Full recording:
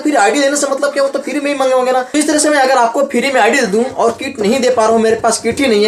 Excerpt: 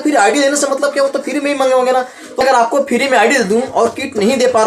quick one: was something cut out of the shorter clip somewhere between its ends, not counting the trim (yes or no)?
yes